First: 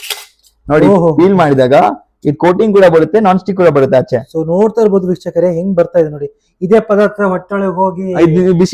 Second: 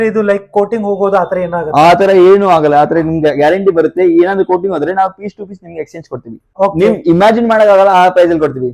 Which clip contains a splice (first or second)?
second